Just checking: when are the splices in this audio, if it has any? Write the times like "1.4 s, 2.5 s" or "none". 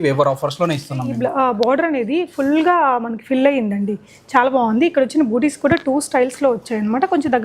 1.1 s